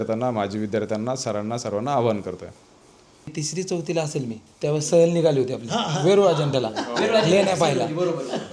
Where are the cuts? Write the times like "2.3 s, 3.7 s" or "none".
3.3 s